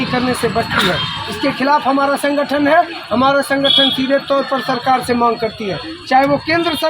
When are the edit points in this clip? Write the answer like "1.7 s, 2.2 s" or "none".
none